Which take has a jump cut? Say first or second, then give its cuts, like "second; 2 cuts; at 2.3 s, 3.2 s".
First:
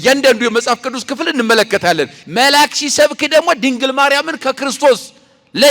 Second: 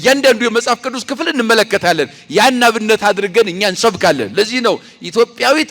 first; 1 cut; at 2.2 s